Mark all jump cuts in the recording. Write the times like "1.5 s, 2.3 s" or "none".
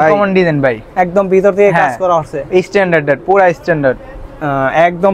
none